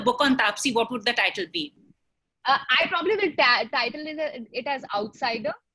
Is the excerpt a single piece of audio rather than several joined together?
no; 1 cut; at 1.8 s

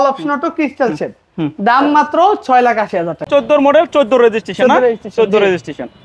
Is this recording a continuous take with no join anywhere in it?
no; 1 cut; at 3.3 s

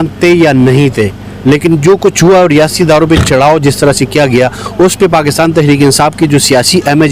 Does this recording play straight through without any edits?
yes; 0 cuts

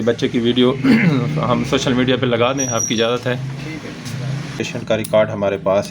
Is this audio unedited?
no; 1 cut; at 4.7 s

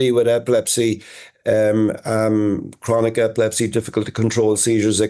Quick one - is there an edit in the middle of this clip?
no; 0 cuts

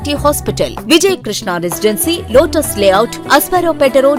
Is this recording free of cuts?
yes; 0 cuts

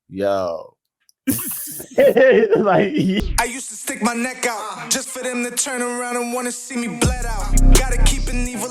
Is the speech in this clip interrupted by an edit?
yes; 1 cut; at 3.2 s

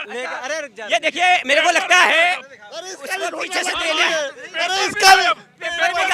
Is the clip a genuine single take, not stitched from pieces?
yes; 0 cuts

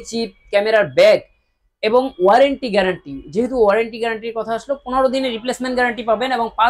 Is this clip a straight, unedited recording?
yes; 0 cuts

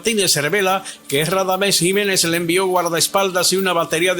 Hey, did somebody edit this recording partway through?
yes; 1 cut; at 2.0 s

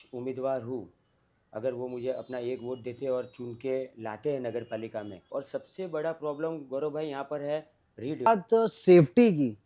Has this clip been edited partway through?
yes; 2 cuts; at 5.3 s, 8.3 s

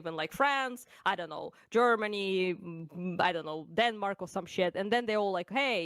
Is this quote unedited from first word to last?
yes; 0 cuts

